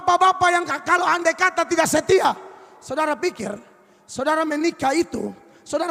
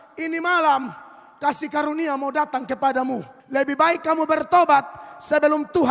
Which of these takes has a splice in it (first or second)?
second